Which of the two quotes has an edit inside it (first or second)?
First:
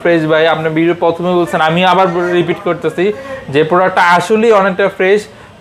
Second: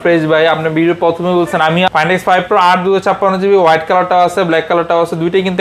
second